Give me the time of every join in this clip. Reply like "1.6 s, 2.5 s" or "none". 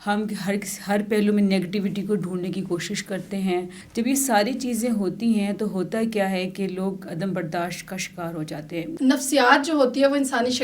3.8 s, 8.9 s